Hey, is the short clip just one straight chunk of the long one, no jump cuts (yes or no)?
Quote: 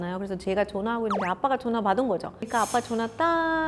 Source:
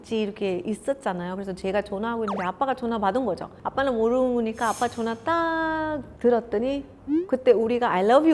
no